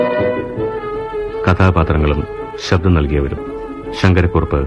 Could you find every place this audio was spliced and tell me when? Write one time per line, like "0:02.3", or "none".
0:03.4